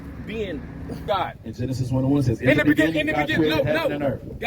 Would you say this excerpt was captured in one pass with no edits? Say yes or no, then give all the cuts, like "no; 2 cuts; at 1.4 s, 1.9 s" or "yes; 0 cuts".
no; 1 cut; at 1.0 s